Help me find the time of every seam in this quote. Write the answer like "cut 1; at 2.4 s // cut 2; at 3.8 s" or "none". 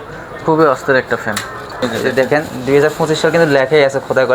cut 1; at 1.7 s